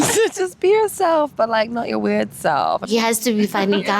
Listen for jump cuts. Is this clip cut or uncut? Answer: cut